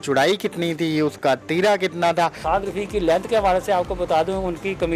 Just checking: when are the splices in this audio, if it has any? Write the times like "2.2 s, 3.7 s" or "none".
2.4 s